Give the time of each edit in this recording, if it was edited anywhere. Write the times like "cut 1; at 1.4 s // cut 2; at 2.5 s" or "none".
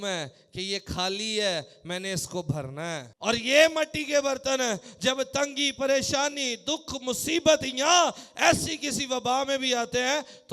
cut 1; at 3.1 s